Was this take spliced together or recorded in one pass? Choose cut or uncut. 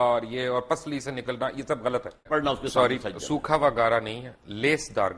cut